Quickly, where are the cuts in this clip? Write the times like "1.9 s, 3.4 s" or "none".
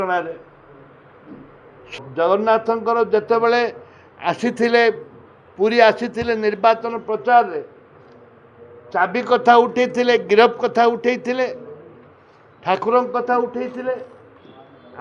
1.9 s